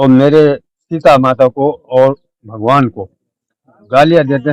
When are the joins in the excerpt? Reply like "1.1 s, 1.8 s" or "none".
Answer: none